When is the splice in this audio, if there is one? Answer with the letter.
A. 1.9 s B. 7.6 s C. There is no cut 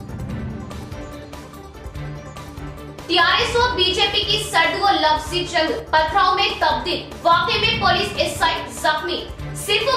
A